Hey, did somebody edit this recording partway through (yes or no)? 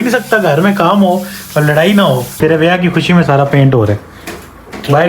yes